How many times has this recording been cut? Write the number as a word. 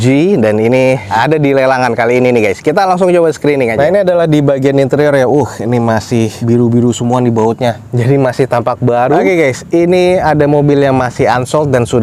two